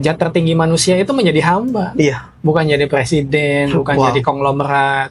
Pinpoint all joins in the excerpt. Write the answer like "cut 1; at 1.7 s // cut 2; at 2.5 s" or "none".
none